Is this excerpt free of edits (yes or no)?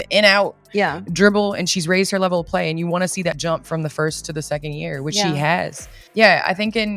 yes